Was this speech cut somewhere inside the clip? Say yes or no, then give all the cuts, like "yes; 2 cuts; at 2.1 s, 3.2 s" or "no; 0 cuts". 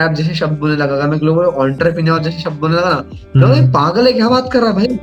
no; 0 cuts